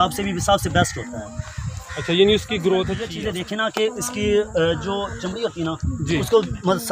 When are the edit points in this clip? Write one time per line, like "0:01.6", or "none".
0:03.0